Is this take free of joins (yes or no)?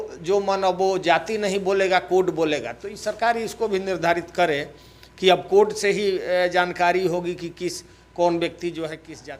yes